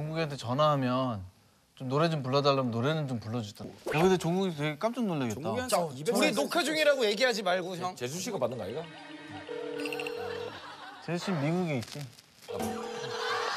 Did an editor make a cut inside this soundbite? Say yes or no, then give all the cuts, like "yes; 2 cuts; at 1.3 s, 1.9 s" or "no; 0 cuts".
yes; 2 cuts; at 3.6 s, 8.0 s